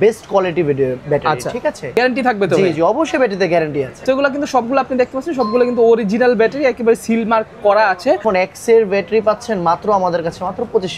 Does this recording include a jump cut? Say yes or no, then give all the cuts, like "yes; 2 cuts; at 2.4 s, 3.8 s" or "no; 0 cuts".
yes; 3 cuts; at 1.9 s, 4.0 s, 8.2 s